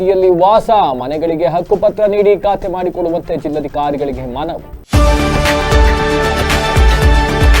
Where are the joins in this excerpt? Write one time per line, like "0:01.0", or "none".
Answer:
0:04.7